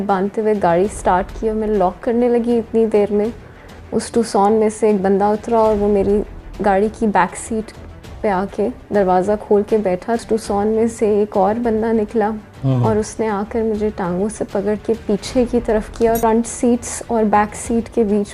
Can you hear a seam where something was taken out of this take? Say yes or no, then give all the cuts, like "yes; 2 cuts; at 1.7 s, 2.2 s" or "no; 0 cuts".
yes; 2 cuts; at 10.2 s, 16.2 s